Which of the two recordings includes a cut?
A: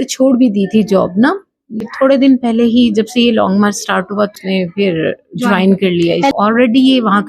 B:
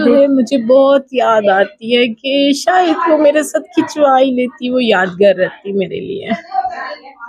A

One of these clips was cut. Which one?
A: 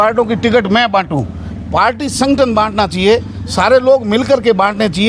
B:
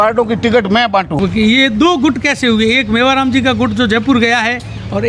B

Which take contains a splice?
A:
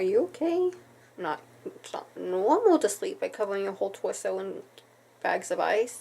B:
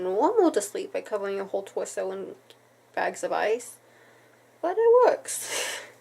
A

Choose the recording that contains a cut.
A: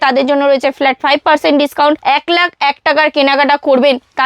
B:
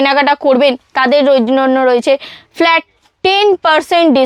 A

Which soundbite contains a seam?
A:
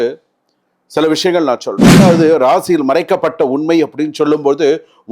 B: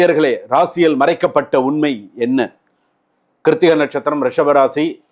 A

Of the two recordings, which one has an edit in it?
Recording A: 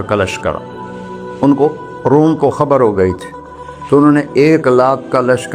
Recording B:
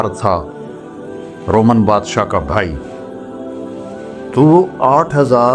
B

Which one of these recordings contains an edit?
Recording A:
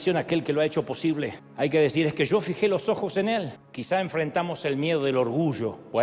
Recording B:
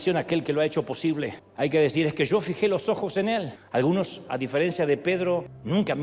A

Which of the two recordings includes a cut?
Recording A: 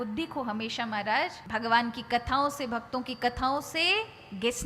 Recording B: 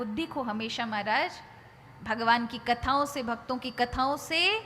A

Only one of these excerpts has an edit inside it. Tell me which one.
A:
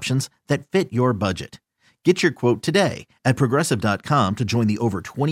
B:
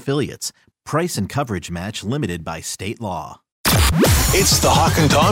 B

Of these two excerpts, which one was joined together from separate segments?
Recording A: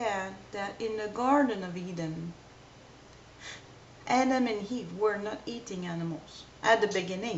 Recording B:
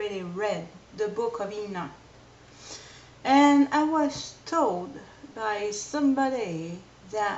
A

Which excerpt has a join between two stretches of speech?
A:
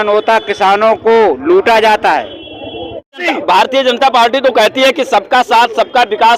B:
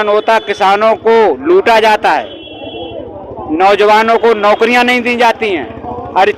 A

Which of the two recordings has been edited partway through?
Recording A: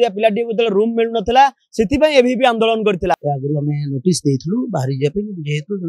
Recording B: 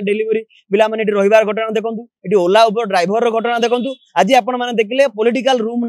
A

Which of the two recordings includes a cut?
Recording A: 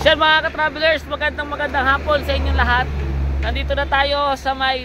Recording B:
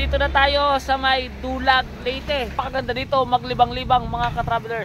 B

